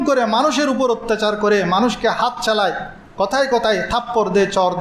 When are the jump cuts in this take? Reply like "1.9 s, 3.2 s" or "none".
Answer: none